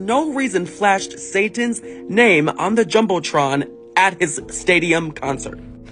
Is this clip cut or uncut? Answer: uncut